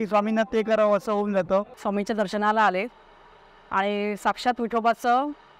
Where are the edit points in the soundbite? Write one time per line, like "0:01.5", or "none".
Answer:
0:01.8